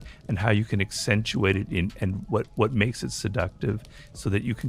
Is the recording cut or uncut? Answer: uncut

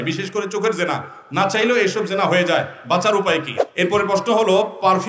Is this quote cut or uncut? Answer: cut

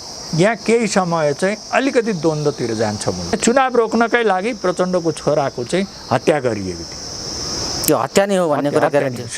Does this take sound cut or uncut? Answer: cut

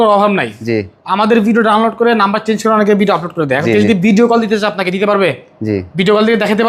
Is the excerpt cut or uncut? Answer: uncut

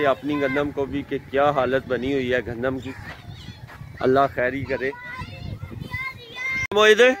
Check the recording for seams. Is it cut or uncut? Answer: uncut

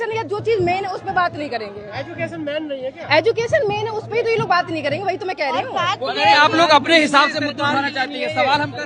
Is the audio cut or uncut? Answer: uncut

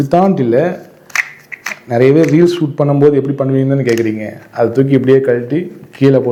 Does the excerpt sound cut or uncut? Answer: uncut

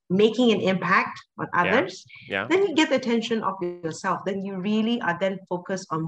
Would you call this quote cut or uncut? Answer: uncut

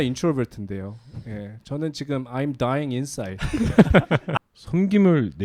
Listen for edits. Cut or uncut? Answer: cut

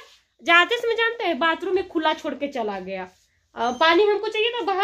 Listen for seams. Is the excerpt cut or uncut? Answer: uncut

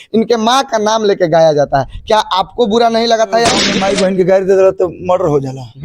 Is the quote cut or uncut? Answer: cut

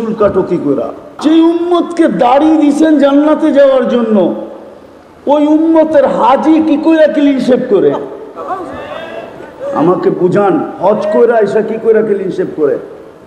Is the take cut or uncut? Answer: cut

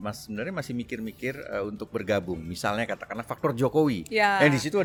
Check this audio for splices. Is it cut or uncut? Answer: uncut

